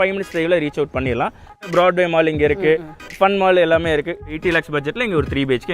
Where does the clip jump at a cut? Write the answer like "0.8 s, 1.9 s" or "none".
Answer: 1.6 s, 4.3 s